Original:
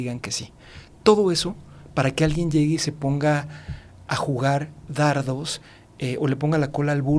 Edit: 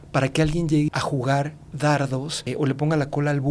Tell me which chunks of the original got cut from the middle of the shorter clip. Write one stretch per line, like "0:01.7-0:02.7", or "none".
0:02.7-0:04.0
0:05.5-0:06.0